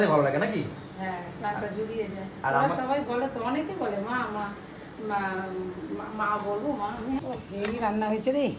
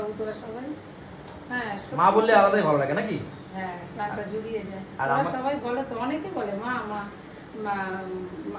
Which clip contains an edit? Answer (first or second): first